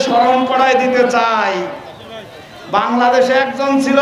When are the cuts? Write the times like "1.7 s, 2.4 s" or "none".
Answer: none